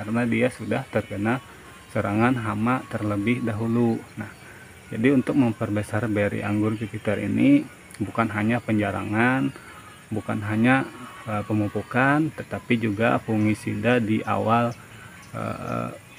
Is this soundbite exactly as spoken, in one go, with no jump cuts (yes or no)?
yes